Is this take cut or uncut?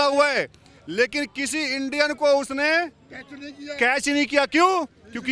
uncut